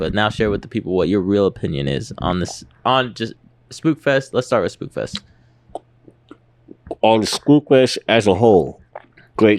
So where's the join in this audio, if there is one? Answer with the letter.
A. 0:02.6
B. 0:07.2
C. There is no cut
C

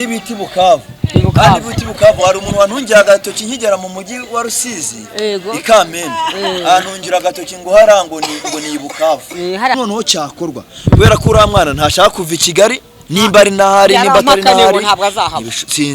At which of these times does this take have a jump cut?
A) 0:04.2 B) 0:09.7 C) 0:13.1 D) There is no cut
B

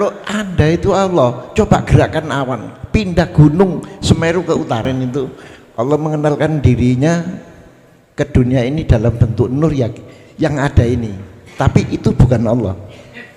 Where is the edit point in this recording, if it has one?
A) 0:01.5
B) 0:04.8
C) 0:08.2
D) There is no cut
B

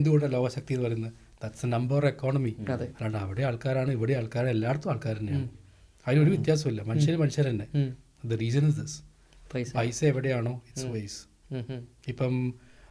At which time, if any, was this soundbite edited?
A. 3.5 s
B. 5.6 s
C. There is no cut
C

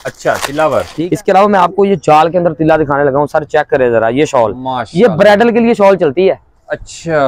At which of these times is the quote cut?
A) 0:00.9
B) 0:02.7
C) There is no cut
A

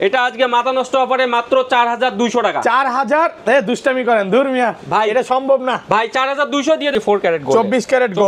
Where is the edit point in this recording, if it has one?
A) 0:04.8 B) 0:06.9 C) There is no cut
B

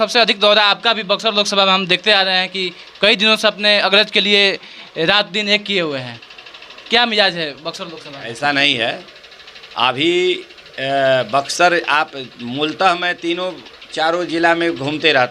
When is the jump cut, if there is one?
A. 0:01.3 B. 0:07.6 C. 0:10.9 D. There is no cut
D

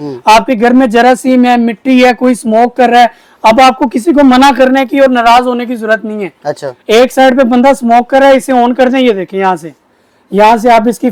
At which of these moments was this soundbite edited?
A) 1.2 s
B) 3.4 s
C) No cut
C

